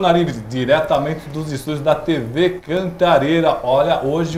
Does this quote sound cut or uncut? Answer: uncut